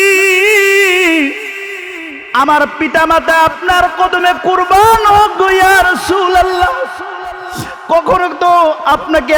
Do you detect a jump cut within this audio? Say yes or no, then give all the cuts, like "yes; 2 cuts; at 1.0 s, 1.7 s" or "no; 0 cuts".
no; 0 cuts